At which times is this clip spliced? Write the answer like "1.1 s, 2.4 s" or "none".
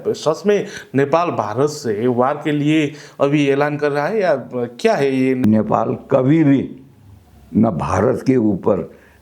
5.4 s